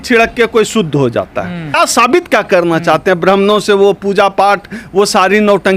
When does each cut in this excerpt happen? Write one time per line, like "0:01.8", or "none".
0:01.8

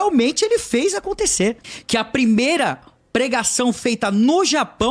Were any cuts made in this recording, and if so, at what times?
0:01.7

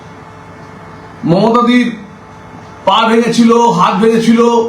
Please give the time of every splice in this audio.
none

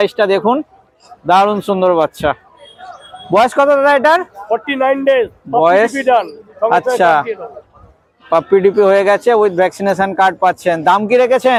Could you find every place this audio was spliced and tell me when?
none

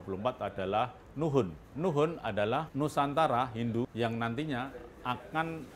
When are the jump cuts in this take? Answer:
0:01.6
0:02.7
0:03.9

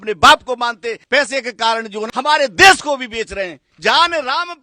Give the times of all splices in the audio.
0:01.0
0:02.0
0:03.7

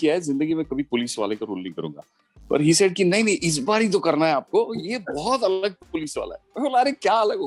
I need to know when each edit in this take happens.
none

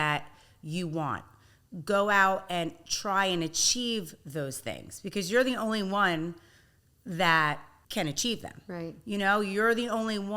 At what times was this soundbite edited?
0:07.7

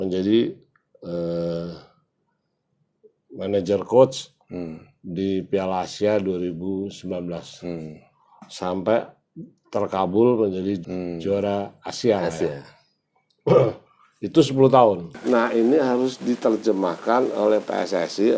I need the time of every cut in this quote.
0:10.8
0:15.1

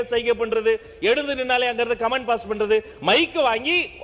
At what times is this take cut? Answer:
none

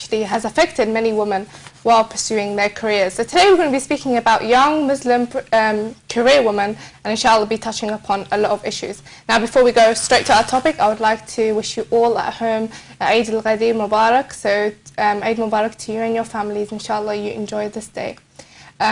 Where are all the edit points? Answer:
0:12.2

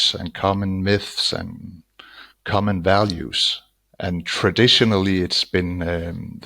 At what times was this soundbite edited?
0:04.0

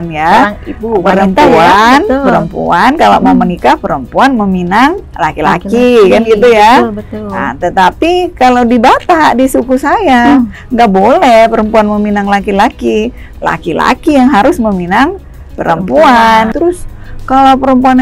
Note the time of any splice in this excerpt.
0:16.5

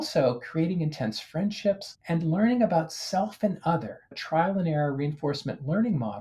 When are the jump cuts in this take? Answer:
0:01.9
0:04.2

